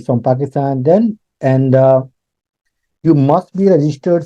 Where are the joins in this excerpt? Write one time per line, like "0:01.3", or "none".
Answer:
none